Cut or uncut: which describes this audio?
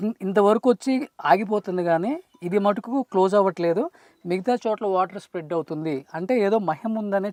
uncut